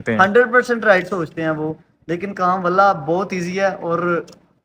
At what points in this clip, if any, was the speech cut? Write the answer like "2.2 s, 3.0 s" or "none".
none